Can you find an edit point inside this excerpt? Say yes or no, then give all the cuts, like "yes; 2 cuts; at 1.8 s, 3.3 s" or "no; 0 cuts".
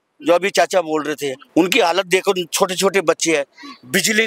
yes; 1 cut; at 1.3 s